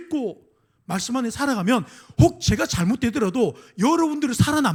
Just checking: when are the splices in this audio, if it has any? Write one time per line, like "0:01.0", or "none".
none